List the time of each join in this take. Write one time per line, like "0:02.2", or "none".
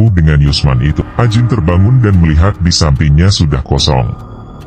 0:01.0